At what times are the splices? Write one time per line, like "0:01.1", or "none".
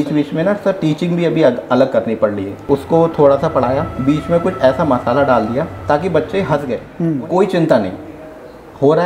0:02.5
0:06.9